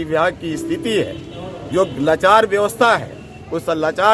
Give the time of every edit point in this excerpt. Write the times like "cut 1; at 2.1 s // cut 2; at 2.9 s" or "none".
none